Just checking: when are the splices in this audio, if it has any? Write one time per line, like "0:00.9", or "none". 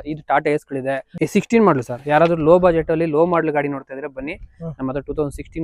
0:01.1